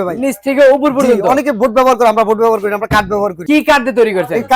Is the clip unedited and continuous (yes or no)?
no